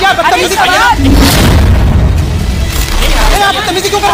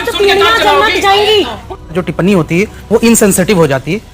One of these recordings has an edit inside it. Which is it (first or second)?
second